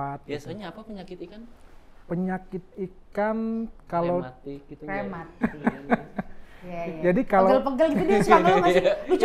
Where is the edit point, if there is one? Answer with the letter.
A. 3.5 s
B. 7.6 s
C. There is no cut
C